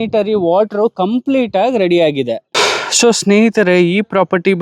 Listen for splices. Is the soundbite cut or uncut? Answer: cut